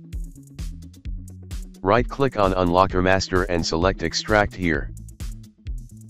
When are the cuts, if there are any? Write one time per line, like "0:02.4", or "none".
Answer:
none